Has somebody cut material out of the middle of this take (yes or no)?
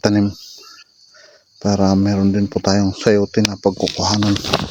no